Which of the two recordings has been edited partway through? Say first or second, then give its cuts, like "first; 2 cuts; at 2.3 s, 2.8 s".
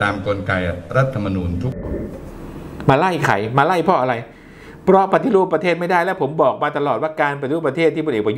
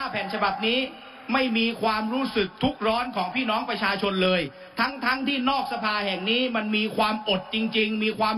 first; 1 cut; at 1.8 s